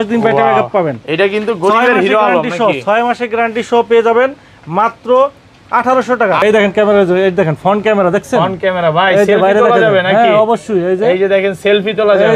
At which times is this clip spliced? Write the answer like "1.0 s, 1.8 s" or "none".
6.4 s